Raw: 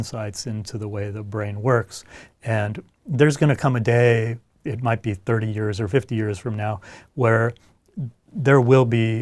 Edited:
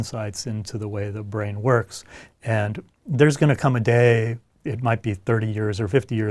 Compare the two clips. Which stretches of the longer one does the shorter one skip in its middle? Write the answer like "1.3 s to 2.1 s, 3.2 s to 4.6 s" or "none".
none